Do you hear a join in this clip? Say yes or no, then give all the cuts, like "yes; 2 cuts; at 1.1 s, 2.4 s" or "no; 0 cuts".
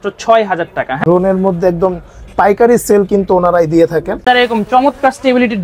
yes; 2 cuts; at 1.0 s, 4.2 s